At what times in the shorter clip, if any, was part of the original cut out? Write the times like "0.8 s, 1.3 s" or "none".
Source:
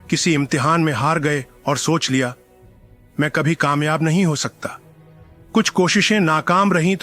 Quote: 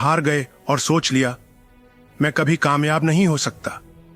none